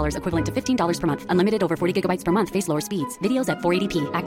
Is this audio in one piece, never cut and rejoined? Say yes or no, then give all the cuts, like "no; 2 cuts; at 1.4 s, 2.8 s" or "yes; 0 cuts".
yes; 0 cuts